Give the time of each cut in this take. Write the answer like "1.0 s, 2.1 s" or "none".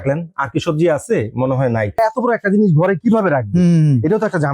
2.0 s